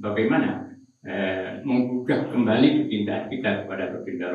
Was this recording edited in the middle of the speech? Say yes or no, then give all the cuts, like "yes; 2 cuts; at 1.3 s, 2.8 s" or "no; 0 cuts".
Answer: no; 0 cuts